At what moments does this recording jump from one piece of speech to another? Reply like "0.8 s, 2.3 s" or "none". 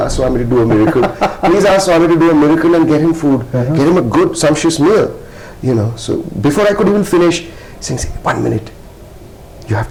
none